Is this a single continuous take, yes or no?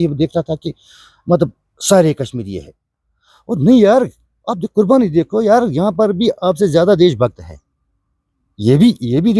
yes